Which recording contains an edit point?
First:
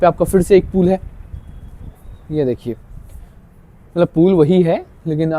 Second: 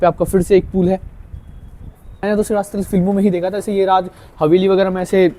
second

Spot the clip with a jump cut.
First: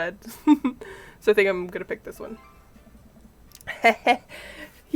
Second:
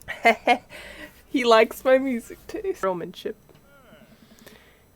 second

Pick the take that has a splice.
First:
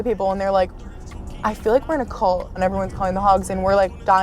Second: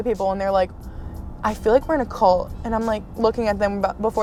first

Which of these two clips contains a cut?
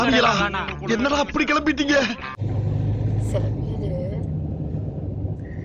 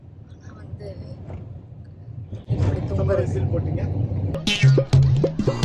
first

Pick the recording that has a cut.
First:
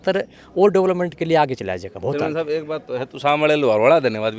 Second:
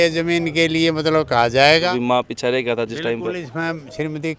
second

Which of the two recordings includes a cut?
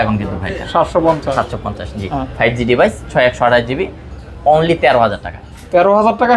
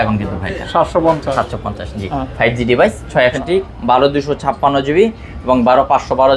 second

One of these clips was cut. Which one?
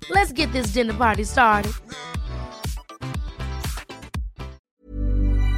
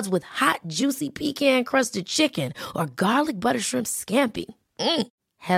first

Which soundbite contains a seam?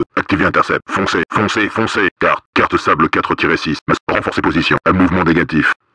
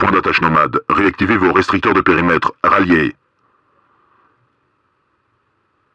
first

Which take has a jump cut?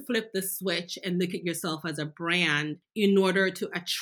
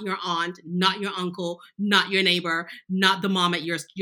first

